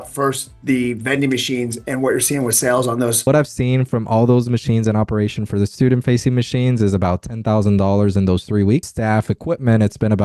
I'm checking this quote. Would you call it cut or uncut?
cut